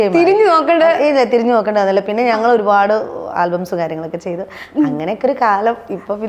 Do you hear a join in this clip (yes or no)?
no